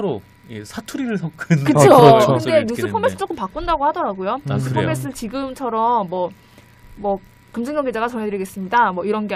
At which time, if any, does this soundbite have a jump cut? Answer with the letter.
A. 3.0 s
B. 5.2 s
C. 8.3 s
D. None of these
A